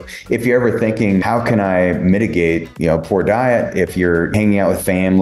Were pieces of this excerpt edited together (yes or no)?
yes